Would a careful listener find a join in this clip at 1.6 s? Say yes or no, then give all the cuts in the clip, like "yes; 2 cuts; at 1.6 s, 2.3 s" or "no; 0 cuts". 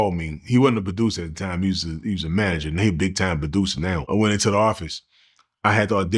no; 1 cut; at 4.1 s